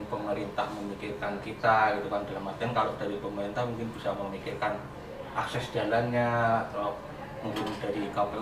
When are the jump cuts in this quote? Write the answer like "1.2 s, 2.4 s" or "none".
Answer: none